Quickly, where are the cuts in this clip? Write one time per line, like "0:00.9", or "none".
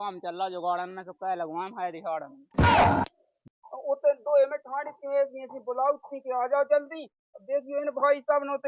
0:02.4
0:03.2

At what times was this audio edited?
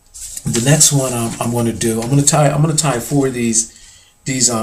0:01.3

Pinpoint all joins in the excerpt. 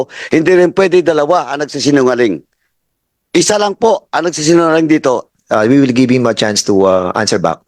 0:05.3

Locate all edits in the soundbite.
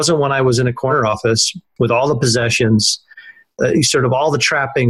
0:01.1
0:03.6

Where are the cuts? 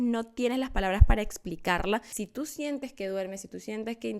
0:02.2

